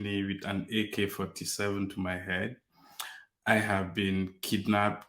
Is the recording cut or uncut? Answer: uncut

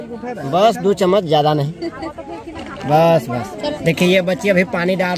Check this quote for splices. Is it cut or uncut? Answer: cut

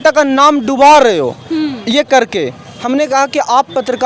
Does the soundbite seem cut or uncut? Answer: uncut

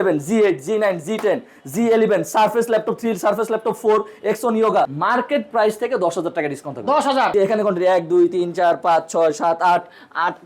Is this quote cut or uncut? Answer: cut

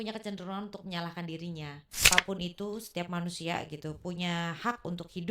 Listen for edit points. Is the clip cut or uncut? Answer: cut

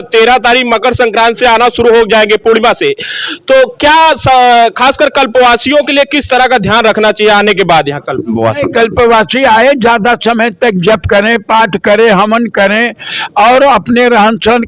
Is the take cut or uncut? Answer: uncut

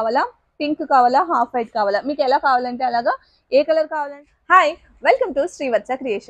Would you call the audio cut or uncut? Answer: cut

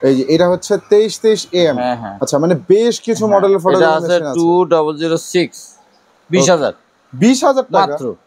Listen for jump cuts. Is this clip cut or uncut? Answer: cut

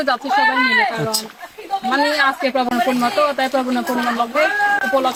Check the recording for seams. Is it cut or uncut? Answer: uncut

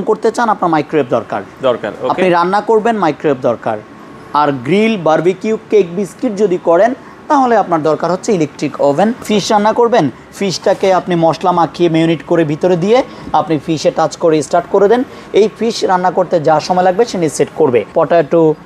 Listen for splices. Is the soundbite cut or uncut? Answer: cut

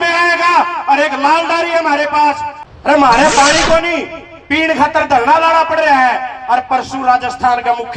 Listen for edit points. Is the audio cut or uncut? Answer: cut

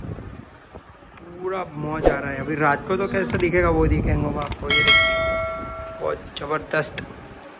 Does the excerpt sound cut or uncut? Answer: uncut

